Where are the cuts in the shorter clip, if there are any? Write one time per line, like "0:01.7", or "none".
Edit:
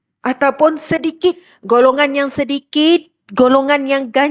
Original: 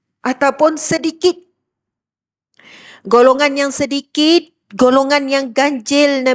0:01.5